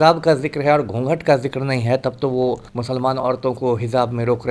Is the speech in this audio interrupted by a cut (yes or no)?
yes